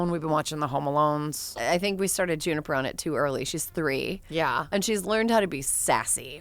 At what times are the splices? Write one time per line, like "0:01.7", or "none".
0:01.5